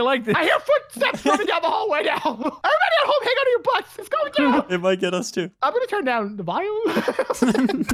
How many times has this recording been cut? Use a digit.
2